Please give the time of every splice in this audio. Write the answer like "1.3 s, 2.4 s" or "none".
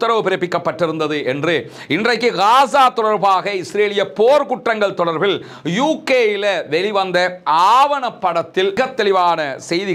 none